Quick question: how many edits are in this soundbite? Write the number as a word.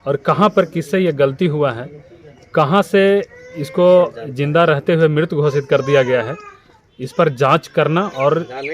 zero